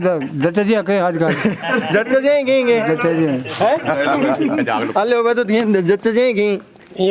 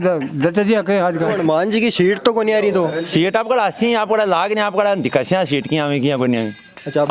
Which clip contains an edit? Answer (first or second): second